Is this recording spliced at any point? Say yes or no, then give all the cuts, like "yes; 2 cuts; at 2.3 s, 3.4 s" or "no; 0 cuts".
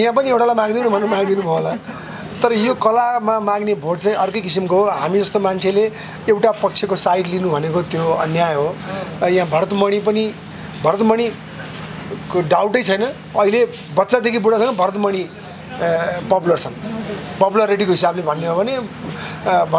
no; 0 cuts